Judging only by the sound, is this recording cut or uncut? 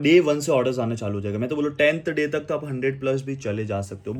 uncut